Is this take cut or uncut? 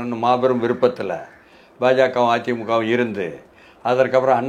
uncut